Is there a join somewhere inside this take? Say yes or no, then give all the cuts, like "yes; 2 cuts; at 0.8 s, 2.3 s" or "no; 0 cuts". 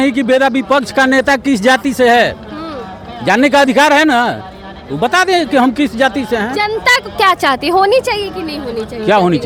no; 0 cuts